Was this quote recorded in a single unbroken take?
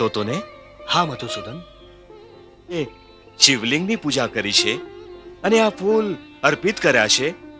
no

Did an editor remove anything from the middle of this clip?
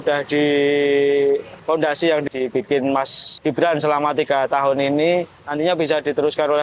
yes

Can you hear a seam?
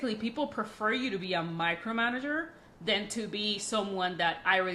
no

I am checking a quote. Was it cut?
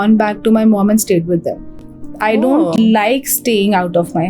no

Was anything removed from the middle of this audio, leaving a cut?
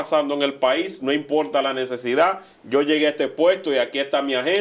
no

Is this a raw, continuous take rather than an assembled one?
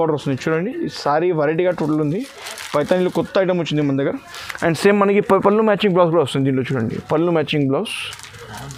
yes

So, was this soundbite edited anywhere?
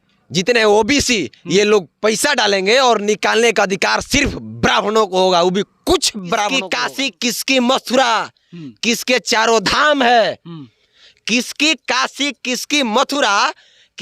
yes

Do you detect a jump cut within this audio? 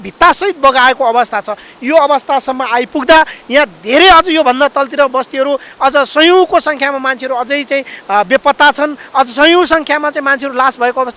no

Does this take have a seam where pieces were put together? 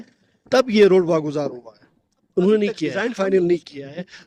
yes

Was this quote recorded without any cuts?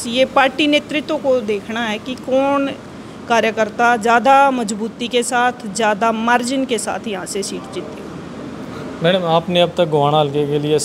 yes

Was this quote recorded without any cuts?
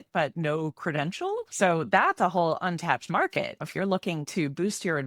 no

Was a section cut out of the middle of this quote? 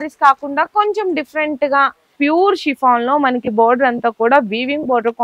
yes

